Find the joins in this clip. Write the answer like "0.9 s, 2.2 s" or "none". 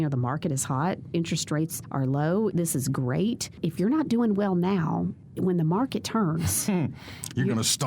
1.8 s, 2.5 s, 3.5 s, 5.2 s